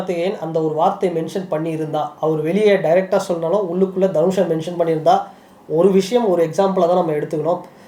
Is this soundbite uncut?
yes; 0 cuts

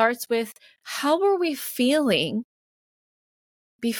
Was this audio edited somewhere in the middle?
no; 0 cuts

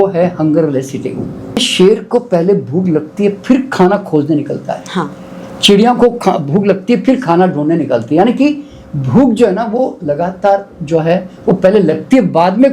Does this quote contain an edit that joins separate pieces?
yes; 1 cut; at 1.7 s

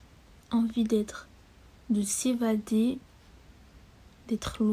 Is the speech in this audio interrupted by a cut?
no; 0 cuts

